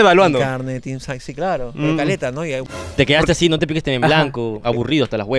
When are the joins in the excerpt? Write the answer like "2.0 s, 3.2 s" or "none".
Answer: 2.7 s